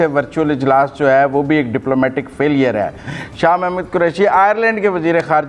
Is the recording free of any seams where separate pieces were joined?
yes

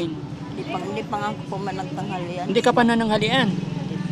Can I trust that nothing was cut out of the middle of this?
yes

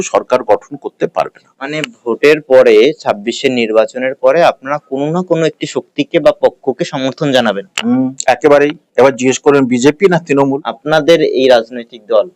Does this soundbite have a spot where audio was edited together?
yes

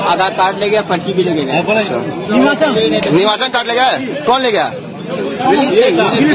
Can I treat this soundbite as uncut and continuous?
yes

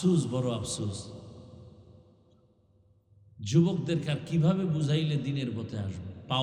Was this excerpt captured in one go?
yes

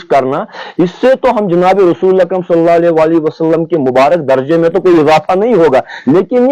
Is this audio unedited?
yes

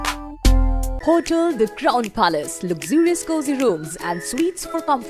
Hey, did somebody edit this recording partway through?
yes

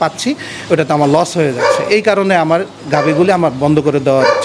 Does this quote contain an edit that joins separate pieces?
no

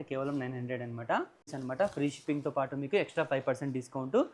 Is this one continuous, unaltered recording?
no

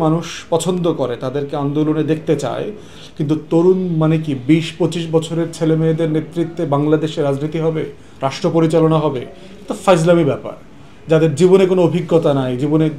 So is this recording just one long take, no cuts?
yes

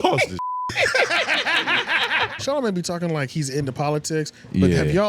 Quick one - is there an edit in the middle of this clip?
yes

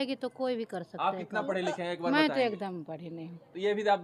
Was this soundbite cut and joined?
no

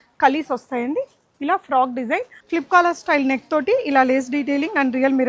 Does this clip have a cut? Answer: yes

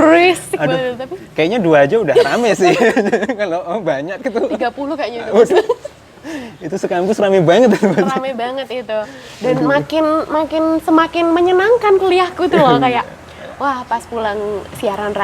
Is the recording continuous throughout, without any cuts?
yes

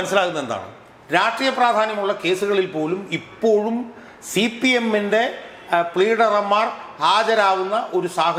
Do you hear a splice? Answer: no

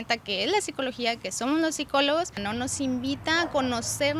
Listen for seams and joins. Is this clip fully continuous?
no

